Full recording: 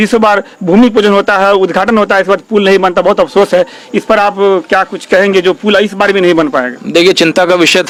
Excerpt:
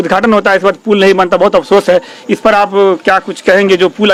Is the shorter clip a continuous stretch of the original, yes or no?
yes